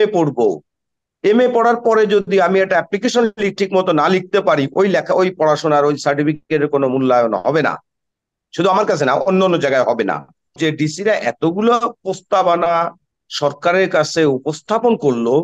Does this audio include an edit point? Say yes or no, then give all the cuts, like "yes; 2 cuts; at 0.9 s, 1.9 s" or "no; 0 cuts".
yes; 1 cut; at 10.6 s